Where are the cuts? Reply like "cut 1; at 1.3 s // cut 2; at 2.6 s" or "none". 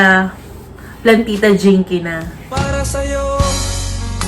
cut 1; at 2.3 s